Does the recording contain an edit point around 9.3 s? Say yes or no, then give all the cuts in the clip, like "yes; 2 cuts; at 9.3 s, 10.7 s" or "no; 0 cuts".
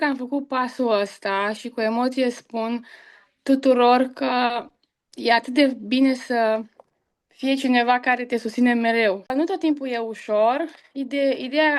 yes; 1 cut; at 9.3 s